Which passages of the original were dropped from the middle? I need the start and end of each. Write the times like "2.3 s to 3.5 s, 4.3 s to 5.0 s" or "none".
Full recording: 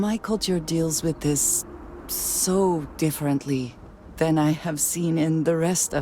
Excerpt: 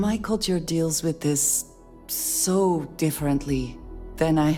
none